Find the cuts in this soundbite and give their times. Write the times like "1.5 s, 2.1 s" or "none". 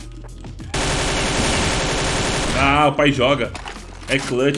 none